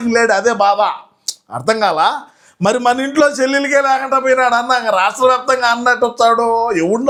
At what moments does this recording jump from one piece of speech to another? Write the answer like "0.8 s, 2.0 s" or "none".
none

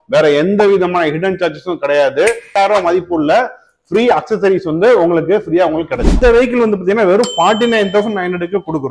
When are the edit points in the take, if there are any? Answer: 2.5 s, 6.1 s

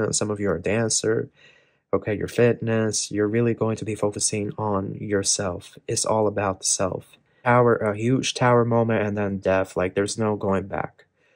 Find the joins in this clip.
7.4 s

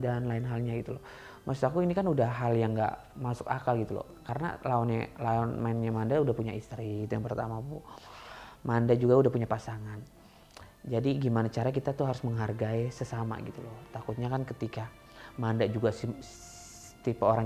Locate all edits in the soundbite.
none

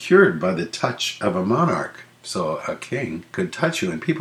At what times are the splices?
2.6 s

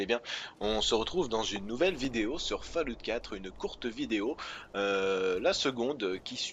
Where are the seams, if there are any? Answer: none

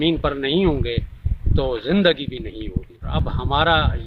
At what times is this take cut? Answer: 3.1 s

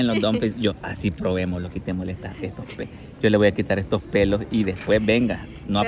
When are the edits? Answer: none

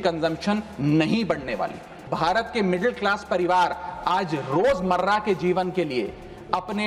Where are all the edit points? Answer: 2.1 s

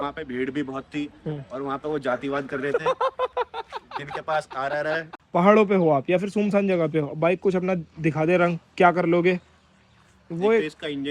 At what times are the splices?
5.1 s

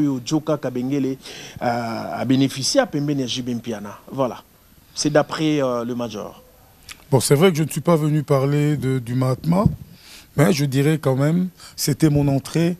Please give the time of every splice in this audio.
none

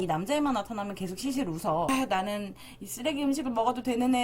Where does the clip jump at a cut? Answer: 1.9 s

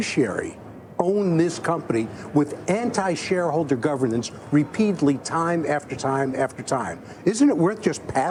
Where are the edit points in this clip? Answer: none

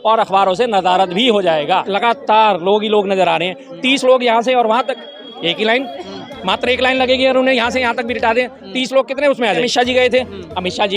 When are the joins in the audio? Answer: 1.9 s, 9.7 s

